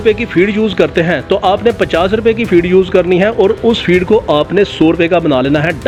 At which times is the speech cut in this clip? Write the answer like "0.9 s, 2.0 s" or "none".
none